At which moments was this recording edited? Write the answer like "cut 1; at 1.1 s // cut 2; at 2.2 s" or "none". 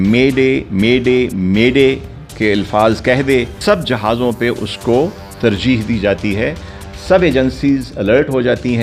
none